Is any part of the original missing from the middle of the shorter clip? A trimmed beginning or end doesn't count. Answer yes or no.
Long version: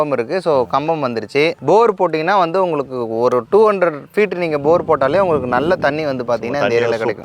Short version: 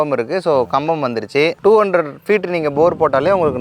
yes